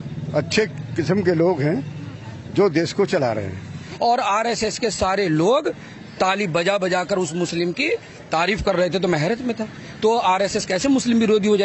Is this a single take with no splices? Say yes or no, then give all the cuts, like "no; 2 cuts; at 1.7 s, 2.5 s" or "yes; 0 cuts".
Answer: no; 1 cut; at 3.6 s